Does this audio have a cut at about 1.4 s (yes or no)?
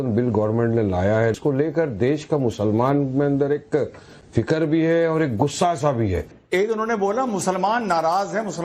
yes